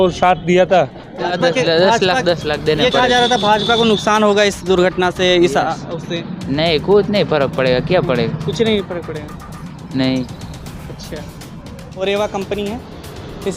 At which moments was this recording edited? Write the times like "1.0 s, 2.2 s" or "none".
1.3 s, 11.8 s